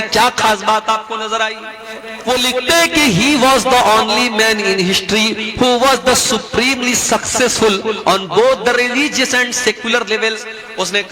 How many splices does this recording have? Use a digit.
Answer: 1